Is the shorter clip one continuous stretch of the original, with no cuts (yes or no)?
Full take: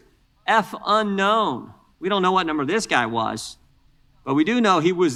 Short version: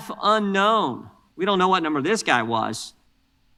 yes